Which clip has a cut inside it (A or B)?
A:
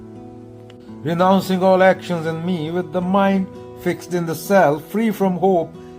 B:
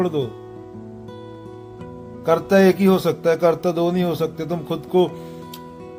A